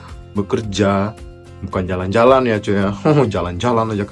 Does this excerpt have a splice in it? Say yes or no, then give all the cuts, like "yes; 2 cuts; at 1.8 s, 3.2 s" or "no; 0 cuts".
no; 0 cuts